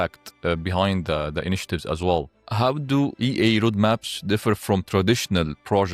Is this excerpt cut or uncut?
cut